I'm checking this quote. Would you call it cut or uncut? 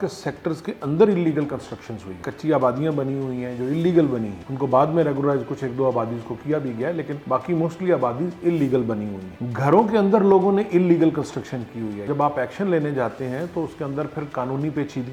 uncut